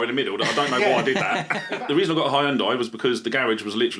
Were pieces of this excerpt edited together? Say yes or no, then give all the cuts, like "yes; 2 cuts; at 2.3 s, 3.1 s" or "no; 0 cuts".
yes; 1 cut; at 1.6 s